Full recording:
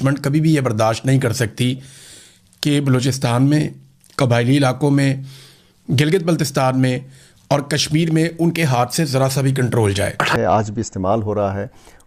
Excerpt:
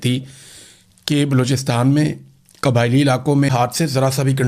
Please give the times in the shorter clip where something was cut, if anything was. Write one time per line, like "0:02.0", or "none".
0:03.5